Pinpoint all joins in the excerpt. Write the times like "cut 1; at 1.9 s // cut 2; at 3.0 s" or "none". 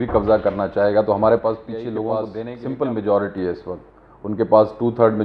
cut 1; at 2.4 s